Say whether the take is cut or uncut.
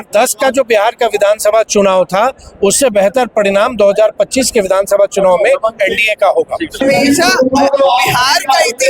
cut